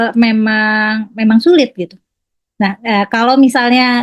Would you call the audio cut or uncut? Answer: uncut